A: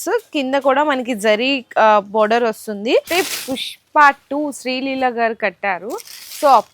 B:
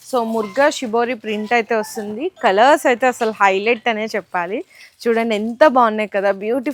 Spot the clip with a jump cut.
A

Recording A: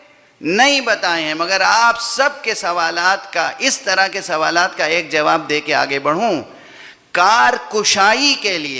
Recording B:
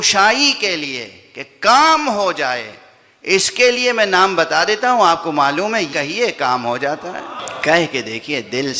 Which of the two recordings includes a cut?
B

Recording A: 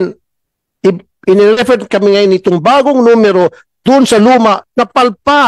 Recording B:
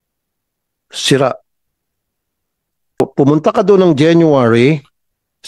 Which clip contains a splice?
B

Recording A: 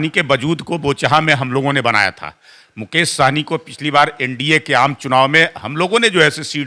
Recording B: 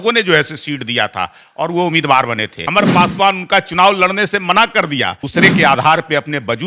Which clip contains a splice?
B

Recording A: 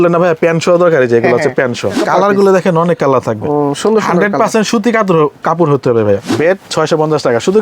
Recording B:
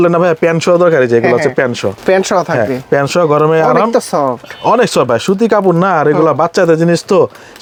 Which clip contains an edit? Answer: A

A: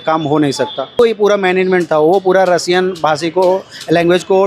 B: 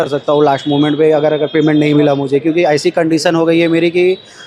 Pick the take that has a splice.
A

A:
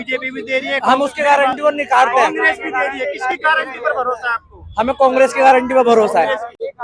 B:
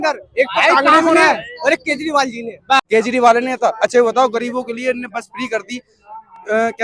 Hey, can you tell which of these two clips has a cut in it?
B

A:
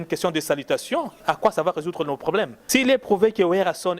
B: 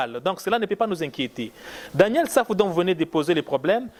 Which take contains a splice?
A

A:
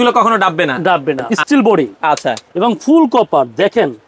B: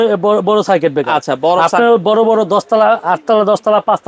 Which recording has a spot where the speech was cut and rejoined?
A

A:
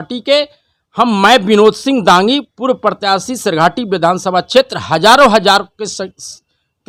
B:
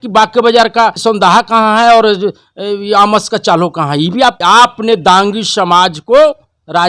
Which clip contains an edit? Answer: B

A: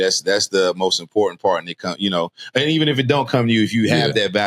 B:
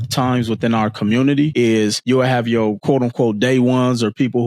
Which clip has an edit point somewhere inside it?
B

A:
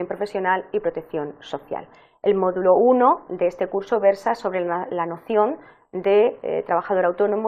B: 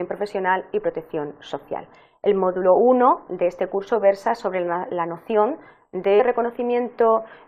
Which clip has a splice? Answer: A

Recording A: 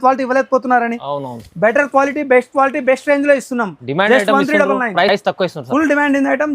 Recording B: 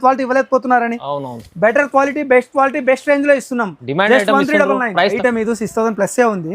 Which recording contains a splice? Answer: B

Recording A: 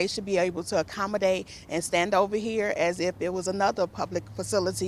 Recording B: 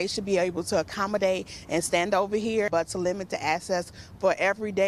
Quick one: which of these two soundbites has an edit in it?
B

